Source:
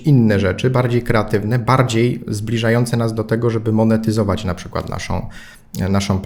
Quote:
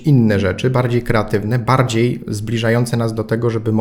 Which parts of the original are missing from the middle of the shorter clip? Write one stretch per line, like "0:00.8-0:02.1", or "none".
none